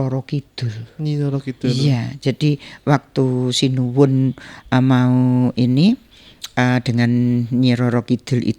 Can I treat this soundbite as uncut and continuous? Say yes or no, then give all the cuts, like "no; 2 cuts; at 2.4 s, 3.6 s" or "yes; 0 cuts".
yes; 0 cuts